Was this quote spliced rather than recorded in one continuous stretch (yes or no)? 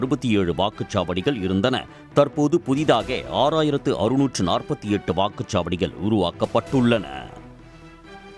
yes